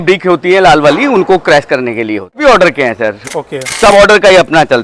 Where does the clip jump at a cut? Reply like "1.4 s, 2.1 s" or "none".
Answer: 2.4 s